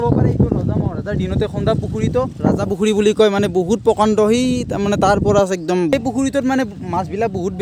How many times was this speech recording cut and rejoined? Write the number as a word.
zero